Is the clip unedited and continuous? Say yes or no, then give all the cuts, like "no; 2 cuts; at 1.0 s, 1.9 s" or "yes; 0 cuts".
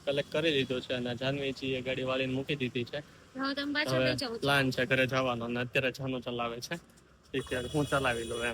yes; 0 cuts